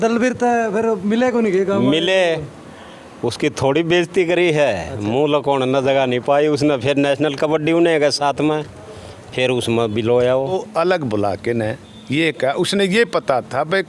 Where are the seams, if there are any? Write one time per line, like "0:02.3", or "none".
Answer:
0:10.5